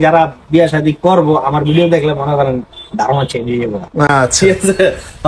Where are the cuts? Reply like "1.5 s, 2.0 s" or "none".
none